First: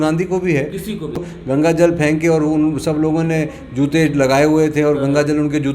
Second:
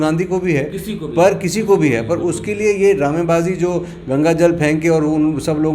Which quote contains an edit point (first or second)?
first